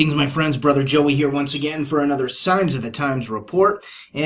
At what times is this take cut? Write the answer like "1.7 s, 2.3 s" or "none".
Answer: none